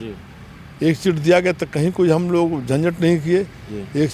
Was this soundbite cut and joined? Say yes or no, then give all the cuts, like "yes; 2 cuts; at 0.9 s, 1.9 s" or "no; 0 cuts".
no; 0 cuts